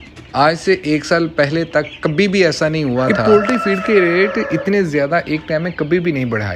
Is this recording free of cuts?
yes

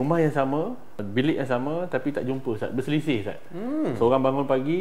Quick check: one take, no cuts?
no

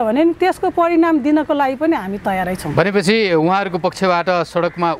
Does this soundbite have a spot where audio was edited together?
no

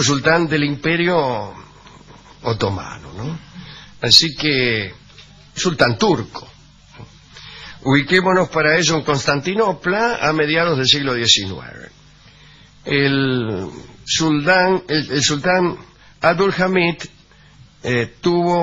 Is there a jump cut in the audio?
no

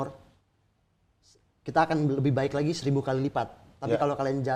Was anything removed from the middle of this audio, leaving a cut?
no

